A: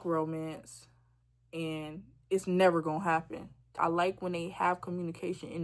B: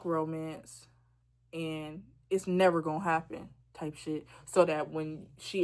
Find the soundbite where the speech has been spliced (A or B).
A